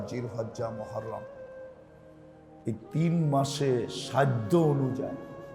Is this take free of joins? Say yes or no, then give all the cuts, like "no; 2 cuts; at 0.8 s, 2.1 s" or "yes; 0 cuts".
yes; 0 cuts